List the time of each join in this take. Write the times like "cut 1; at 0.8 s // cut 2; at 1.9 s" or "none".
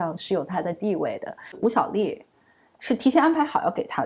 cut 1; at 1.5 s